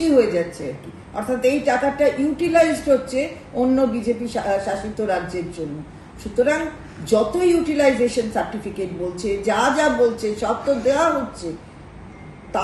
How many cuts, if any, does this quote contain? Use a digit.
0